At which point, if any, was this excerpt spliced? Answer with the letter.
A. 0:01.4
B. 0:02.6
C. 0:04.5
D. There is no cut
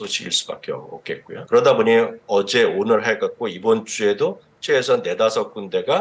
A